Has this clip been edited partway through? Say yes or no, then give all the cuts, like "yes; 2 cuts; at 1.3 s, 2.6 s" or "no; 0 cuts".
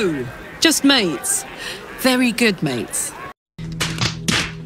yes; 1 cut; at 3.4 s